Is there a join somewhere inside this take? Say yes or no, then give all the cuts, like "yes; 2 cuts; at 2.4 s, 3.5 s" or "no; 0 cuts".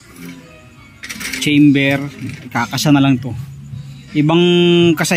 no; 0 cuts